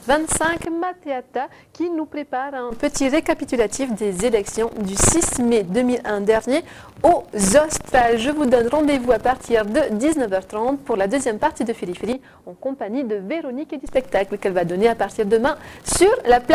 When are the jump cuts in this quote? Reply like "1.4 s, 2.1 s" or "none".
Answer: 3.1 s